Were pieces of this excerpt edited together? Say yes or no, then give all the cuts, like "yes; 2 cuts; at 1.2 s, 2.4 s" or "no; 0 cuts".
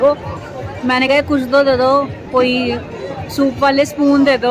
no; 0 cuts